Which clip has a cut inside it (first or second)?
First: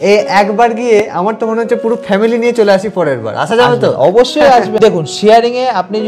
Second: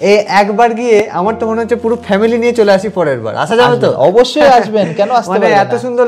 first